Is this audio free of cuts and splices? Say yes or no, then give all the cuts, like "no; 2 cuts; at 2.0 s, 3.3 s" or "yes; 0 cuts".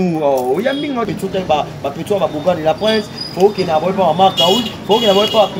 no; 1 cut; at 1.1 s